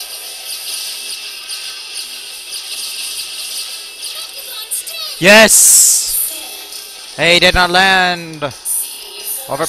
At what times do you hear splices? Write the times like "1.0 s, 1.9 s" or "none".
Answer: 7.5 s